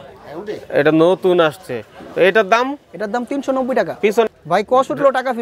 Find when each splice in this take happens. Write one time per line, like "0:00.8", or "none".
0:04.3